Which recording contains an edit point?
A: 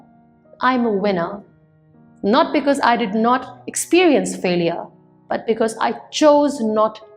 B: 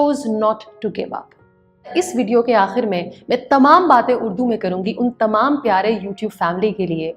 B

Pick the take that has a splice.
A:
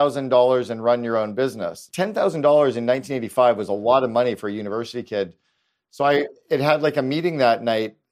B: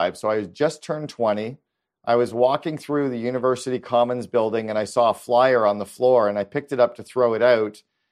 A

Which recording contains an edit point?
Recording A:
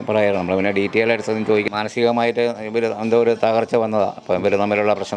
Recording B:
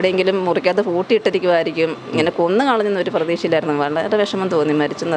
A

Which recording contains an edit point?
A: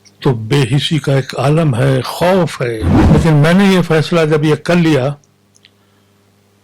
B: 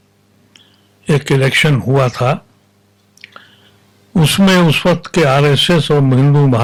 A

